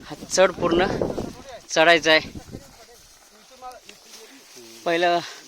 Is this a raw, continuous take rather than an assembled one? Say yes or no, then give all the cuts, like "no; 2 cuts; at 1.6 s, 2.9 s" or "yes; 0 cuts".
no; 1 cut; at 4.0 s